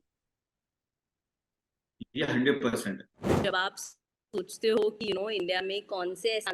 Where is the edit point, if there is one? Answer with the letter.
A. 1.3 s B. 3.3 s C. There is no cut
B